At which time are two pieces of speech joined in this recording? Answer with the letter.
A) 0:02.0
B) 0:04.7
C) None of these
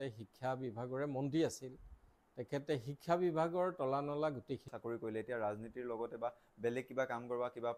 B